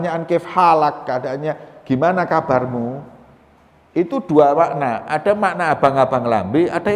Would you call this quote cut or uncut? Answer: uncut